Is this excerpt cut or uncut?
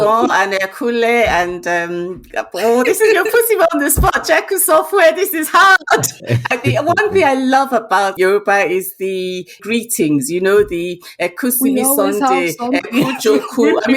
cut